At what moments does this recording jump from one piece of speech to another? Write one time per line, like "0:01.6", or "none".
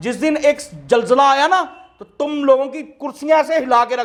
none